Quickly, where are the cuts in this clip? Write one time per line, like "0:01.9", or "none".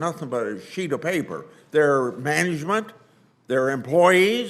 none